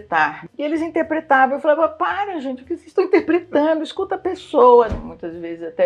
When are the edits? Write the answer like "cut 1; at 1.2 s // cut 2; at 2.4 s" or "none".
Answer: cut 1; at 4.9 s